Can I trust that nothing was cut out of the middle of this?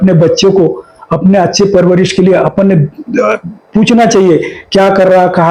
yes; 0 cuts

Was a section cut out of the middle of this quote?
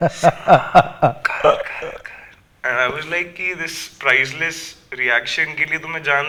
no; 0 cuts

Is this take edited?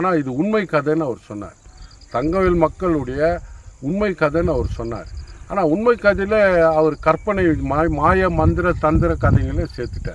no; 0 cuts

